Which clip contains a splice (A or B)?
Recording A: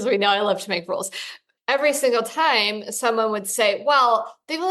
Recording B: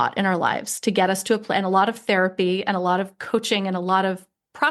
A